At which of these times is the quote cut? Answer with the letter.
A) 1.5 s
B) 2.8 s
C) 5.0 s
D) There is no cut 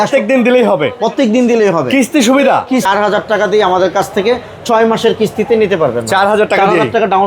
B